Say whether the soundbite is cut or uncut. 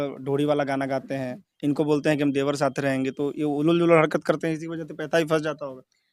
uncut